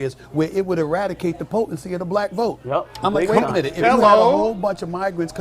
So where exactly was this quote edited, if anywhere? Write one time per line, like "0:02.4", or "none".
none